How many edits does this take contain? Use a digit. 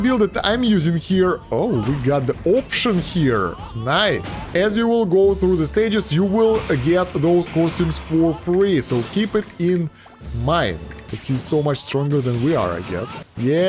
2